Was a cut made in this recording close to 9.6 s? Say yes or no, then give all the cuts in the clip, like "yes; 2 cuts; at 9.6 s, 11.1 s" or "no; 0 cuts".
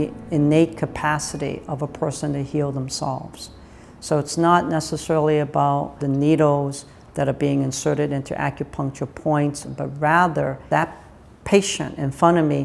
yes; 3 cuts; at 6.0 s, 9.6 s, 10.6 s